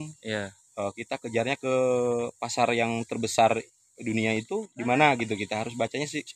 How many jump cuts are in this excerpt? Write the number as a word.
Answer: zero